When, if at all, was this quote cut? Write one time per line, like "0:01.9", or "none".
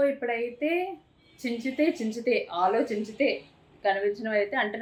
none

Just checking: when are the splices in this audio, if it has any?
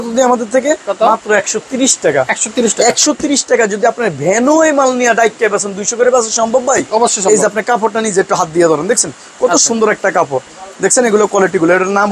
none

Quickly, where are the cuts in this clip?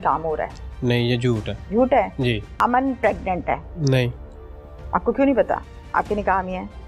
0:01.5
0:02.5
0:03.7

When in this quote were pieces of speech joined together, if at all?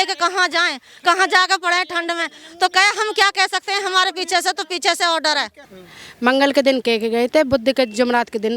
0:05.8

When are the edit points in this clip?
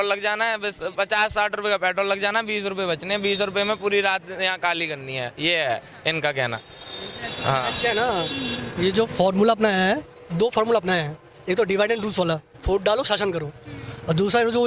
none

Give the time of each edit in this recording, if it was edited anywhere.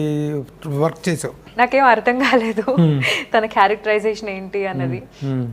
0:01.5

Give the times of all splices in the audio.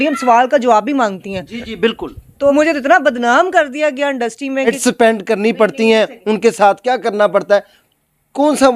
0:02.5
0:04.7

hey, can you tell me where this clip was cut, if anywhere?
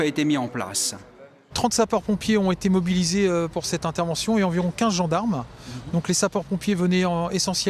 0:03.9

